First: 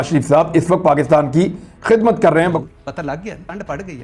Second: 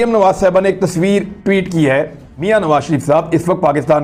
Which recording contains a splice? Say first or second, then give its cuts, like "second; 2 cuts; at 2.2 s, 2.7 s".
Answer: first; 1 cut; at 2.6 s